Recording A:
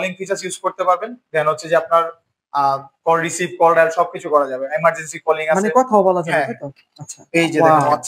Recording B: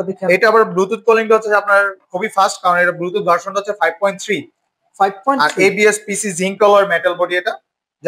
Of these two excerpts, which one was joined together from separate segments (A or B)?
A